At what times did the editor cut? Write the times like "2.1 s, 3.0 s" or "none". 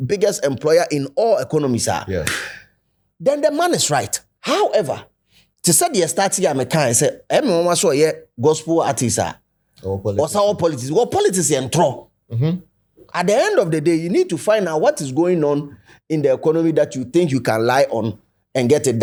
none